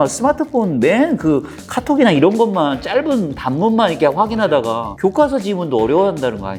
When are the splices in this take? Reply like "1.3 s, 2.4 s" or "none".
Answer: none